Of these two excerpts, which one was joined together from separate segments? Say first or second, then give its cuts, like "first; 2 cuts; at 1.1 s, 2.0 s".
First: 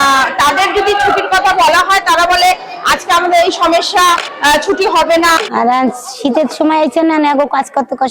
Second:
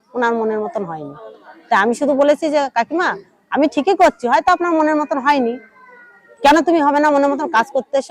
first; 2 cuts; at 4.3 s, 5.4 s